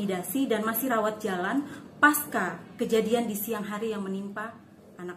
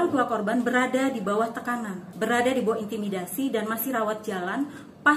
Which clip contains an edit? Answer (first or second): second